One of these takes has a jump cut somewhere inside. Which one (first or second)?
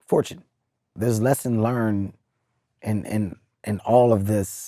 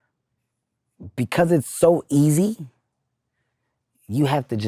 first